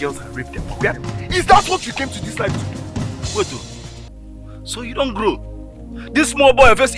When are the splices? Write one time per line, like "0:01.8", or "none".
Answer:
0:01.3